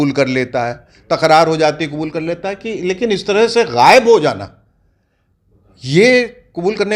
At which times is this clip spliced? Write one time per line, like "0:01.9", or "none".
none